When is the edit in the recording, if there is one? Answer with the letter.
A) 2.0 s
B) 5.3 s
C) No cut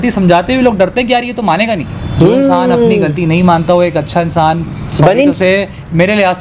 A